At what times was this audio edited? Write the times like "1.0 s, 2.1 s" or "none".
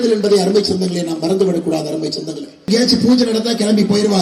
2.7 s